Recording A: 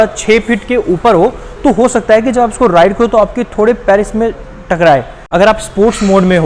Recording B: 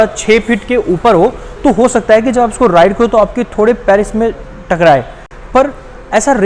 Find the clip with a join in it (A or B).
A